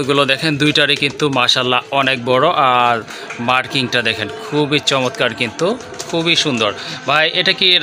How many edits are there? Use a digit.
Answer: 0